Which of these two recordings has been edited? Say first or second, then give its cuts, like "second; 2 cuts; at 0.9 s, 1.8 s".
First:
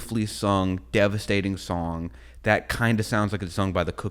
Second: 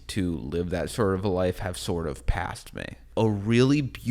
second; 1 cut; at 3.1 s